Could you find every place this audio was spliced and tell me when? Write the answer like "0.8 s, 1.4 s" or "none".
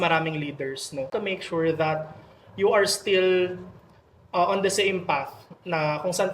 1.1 s

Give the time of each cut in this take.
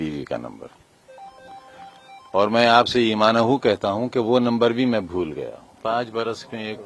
5.8 s

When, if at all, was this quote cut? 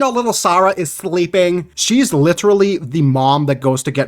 1.7 s

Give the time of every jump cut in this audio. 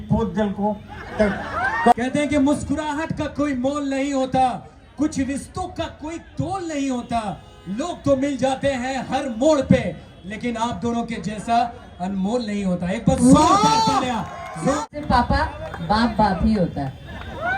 1.9 s, 14.9 s

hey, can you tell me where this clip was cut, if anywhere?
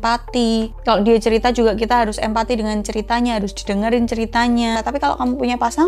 4.8 s

